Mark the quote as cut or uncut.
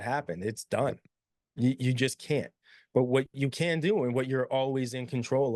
uncut